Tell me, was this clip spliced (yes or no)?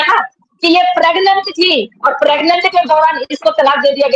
no